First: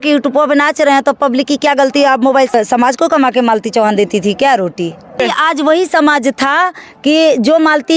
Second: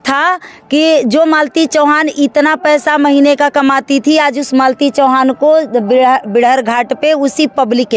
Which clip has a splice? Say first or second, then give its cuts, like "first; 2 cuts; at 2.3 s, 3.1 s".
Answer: first; 2 cuts; at 2.5 s, 5.2 s